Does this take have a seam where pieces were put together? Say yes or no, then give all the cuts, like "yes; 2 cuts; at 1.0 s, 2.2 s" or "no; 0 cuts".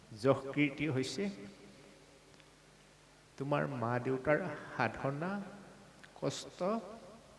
no; 0 cuts